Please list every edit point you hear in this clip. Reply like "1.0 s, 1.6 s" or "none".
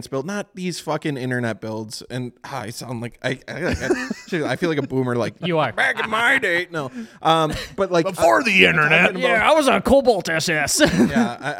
none